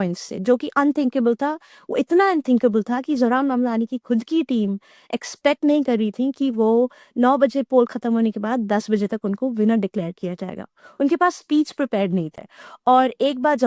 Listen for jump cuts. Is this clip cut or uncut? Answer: cut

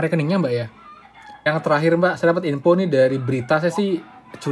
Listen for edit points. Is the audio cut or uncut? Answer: cut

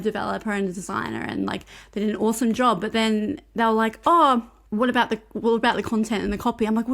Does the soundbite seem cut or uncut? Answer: cut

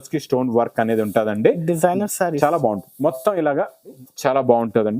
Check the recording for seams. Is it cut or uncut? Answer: cut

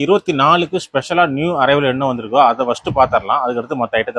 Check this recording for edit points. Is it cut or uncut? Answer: uncut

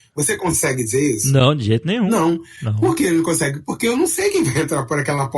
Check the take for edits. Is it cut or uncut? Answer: cut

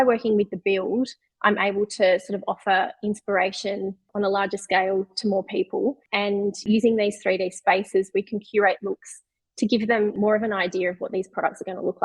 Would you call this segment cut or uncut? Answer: cut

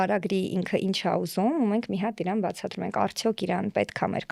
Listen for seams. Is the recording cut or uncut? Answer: uncut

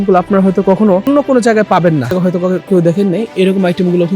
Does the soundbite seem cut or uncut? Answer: cut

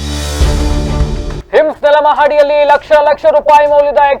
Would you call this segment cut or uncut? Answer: cut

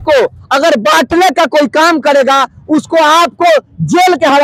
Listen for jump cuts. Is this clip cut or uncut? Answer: uncut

